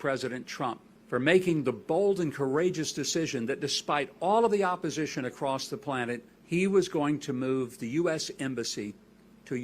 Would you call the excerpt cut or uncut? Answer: cut